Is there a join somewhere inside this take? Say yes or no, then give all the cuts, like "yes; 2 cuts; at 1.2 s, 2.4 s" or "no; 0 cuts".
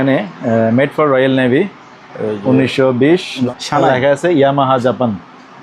yes; 1 cut; at 3.5 s